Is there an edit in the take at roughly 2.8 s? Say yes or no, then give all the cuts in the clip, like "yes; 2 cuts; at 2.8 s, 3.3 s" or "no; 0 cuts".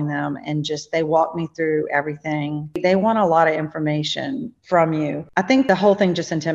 yes; 3 cuts; at 2.8 s, 4.5 s, 5.6 s